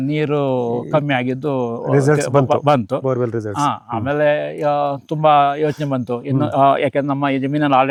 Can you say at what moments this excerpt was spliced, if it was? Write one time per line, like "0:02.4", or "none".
none